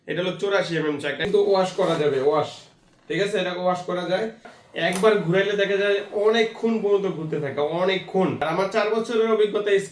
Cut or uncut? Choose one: cut